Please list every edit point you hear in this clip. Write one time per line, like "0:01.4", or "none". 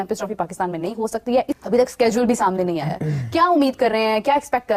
none